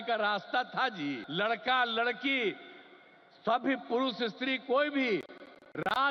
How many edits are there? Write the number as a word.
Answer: one